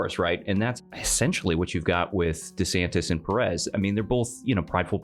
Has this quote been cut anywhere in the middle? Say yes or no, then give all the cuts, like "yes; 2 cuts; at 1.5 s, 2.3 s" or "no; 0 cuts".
no; 0 cuts